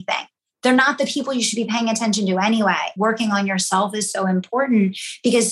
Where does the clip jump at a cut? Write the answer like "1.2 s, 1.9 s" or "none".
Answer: 2.9 s